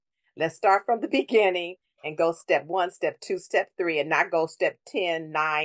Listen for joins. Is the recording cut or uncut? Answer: uncut